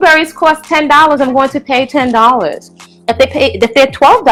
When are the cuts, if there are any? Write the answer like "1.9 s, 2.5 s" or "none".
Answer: none